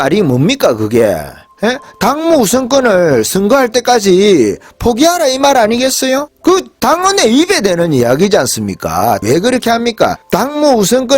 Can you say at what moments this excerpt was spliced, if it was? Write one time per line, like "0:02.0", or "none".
0:06.3
0:09.2
0:10.2